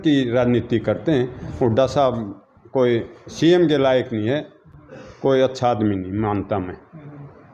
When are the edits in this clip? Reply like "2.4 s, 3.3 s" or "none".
none